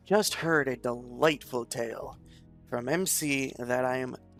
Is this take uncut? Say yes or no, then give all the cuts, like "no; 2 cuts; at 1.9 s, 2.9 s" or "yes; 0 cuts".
yes; 0 cuts